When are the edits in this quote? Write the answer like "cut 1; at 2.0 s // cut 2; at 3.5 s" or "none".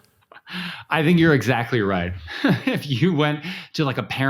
cut 1; at 2.3 s

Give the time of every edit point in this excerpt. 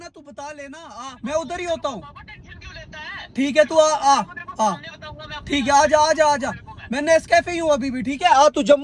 cut 1; at 1.1 s

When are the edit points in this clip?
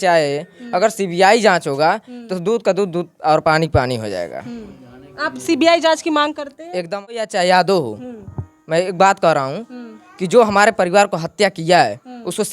cut 1; at 6.9 s

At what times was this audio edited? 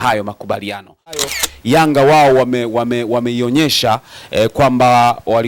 cut 1; at 1.3 s

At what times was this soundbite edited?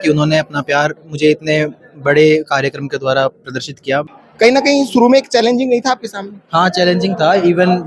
cut 1; at 4.2 s

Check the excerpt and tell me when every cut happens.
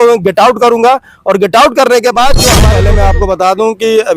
cut 1; at 2.7 s

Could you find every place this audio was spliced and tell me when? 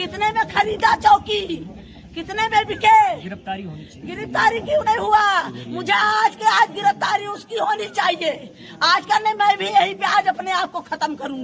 none

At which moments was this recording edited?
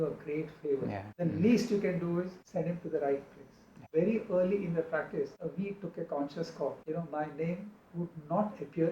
cut 1; at 1.1 s // cut 2; at 2.4 s // cut 3; at 3.8 s // cut 4; at 5.3 s // cut 5; at 6.8 s

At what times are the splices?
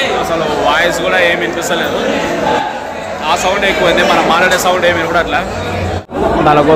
none

